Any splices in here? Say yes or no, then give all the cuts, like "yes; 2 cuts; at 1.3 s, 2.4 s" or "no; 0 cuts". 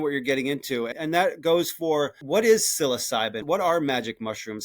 yes; 3 cuts; at 0.9 s, 2.2 s, 3.4 s